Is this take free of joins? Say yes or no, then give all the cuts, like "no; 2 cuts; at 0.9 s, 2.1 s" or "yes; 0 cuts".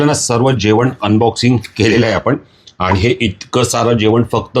yes; 0 cuts